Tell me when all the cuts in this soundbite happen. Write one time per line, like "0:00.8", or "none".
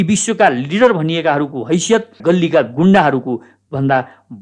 0:02.2